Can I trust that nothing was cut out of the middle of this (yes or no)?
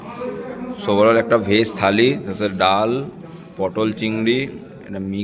yes